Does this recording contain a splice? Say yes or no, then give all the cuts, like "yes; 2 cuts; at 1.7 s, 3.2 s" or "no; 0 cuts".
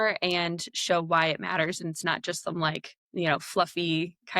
yes; 1 cut; at 2.9 s